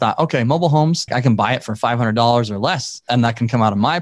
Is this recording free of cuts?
no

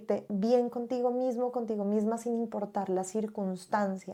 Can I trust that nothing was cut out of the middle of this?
yes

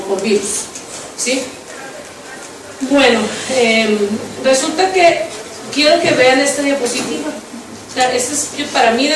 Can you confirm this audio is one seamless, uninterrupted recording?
yes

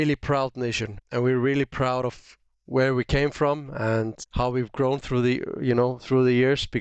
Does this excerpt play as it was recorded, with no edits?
no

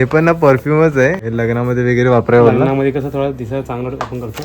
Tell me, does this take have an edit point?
yes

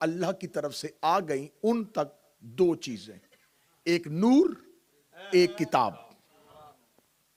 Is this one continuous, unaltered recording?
yes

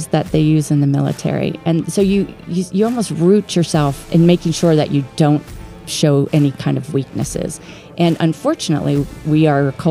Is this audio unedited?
no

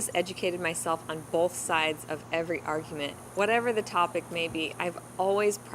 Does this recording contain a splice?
yes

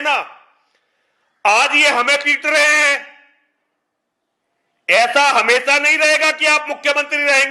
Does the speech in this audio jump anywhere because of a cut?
no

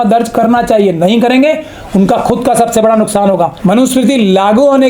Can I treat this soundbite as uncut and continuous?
no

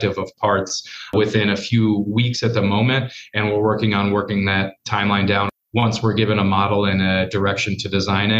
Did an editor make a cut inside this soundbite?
yes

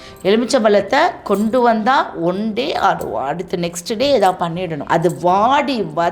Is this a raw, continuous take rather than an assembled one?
no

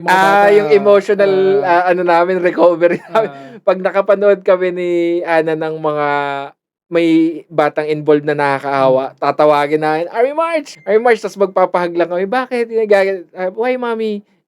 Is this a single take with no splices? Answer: no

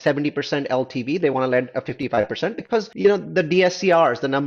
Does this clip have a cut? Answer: yes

